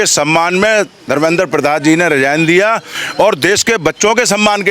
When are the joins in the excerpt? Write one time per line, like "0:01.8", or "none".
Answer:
none